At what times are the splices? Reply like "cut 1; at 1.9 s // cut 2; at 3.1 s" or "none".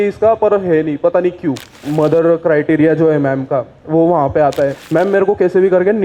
cut 1; at 1.8 s // cut 2; at 4.8 s